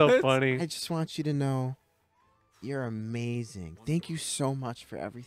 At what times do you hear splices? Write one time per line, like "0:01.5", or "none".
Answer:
none